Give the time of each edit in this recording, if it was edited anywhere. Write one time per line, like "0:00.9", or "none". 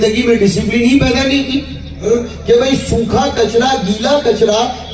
0:02.0